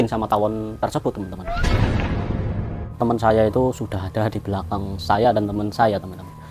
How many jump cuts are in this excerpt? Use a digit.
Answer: 1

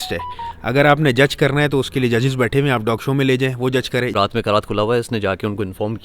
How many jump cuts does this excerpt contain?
1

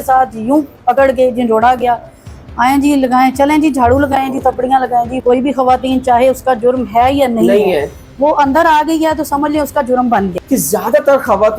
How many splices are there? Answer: 2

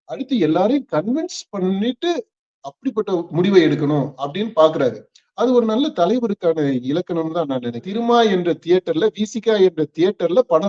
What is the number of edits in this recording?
1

